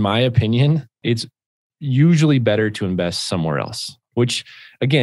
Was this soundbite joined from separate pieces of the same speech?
yes; 1 cut; at 0.9 s

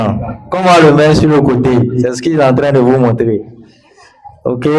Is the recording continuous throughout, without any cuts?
yes; 0 cuts

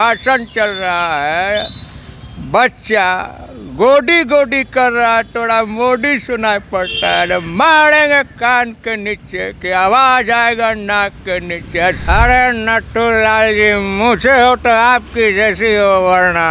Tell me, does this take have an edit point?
yes; 1 cut; at 12.0 s

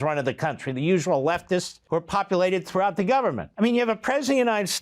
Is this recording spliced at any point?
yes; 2 cuts; at 1.8 s, 3.4 s

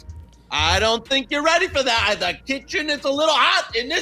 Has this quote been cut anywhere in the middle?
no; 0 cuts

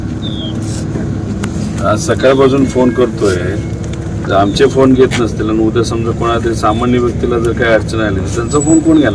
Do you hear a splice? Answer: no; 0 cuts

